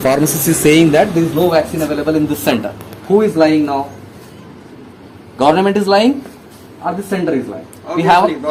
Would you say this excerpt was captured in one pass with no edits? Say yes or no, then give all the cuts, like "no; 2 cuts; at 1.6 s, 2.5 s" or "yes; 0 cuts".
yes; 0 cuts